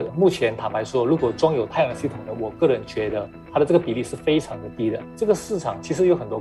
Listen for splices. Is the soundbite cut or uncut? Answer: cut